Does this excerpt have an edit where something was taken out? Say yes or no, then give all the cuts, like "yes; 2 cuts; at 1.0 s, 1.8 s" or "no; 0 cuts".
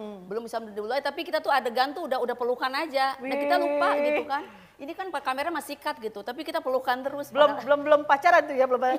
no; 0 cuts